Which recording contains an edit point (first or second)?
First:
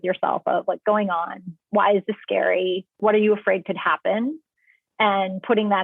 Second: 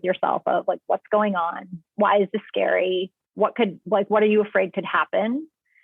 first